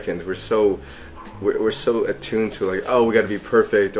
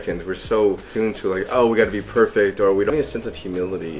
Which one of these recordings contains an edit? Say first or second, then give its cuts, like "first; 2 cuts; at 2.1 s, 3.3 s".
second; 2 cuts; at 0.9 s, 2.9 s